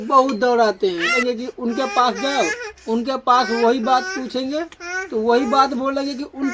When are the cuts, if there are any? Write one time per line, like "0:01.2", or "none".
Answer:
0:01.1